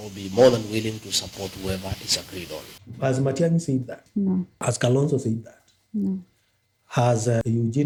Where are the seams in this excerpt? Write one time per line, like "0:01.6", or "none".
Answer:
none

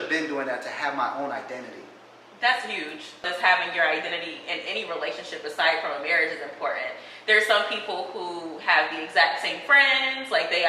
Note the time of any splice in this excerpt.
0:03.3

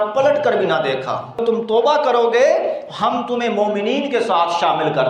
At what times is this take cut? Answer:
0:01.4

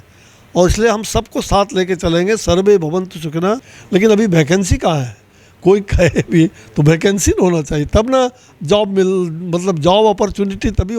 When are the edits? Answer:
0:03.7

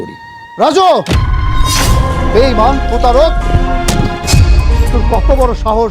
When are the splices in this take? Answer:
none

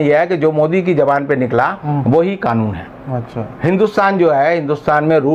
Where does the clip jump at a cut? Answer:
none

